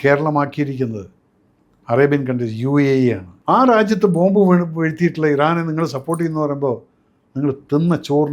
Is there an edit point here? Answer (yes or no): yes